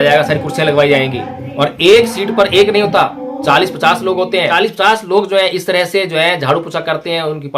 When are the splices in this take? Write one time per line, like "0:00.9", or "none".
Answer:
0:04.5